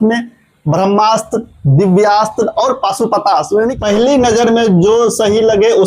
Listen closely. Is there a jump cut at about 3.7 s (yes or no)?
yes